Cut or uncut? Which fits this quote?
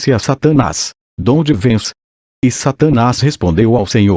cut